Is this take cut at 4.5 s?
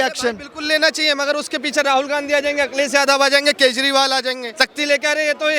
yes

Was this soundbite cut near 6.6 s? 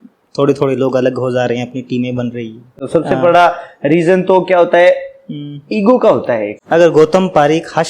yes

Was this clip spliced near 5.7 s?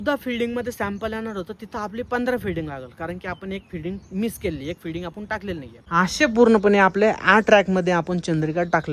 yes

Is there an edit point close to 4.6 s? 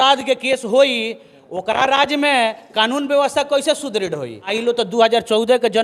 yes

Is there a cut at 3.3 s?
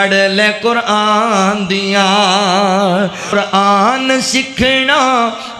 yes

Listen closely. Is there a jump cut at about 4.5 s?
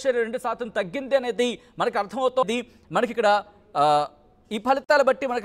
no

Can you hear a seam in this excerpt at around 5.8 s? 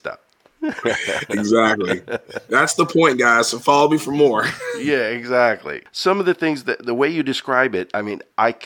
yes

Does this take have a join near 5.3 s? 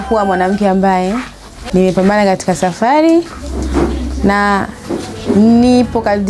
no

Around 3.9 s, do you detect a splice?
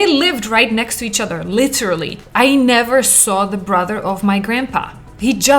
no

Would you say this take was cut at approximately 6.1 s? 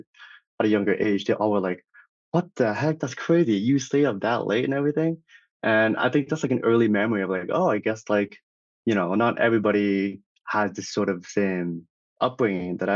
no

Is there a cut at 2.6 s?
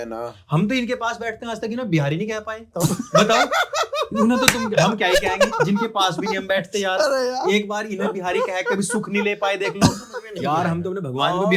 no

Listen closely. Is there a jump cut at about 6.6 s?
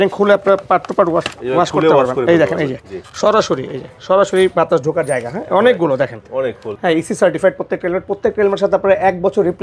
yes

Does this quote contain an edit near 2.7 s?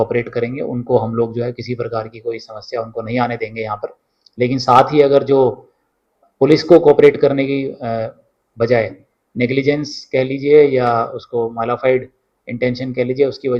no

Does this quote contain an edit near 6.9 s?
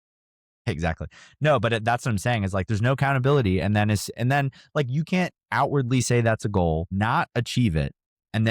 yes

